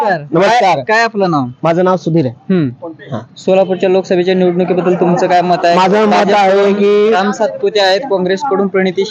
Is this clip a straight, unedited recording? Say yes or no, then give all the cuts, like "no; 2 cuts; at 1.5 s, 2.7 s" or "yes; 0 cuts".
yes; 0 cuts